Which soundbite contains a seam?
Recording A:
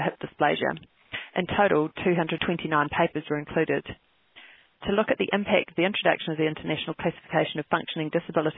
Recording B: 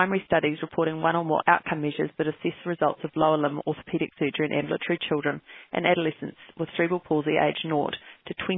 A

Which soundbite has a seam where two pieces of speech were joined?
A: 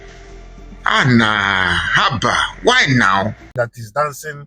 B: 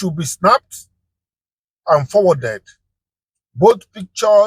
A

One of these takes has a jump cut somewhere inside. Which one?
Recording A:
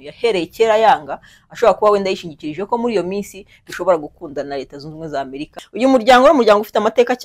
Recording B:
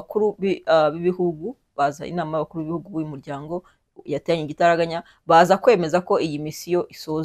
A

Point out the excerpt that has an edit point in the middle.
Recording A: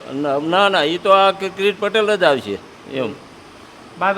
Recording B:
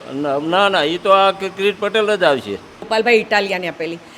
B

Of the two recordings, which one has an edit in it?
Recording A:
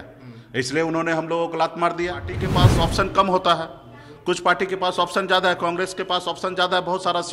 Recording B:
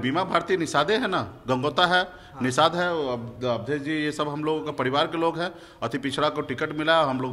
A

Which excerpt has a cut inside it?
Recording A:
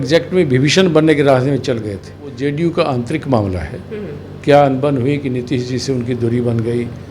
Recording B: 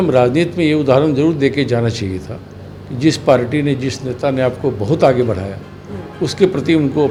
A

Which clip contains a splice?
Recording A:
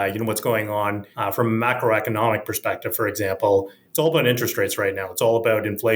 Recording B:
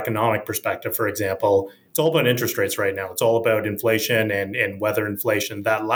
A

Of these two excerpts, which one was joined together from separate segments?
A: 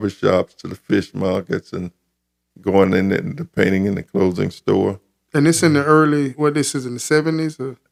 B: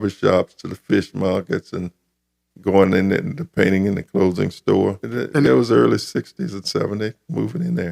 B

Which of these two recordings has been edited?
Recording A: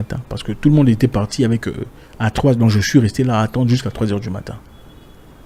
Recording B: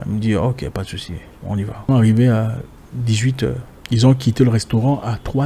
B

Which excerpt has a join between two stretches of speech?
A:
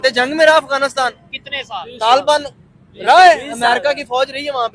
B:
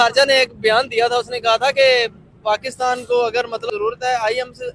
B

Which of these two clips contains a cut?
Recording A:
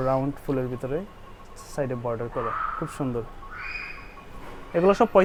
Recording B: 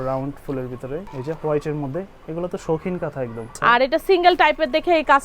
B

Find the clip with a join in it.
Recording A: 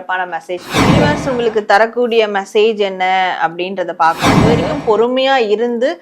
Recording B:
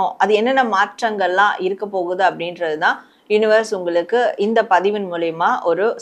A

